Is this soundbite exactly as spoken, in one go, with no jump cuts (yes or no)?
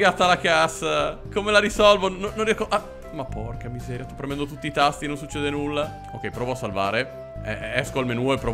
yes